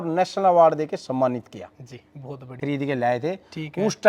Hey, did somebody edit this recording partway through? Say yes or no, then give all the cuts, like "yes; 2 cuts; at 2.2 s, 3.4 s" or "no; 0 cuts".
yes; 1 cut; at 2.5 s